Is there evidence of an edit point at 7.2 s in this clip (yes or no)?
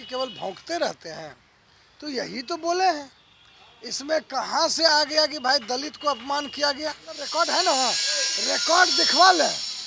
yes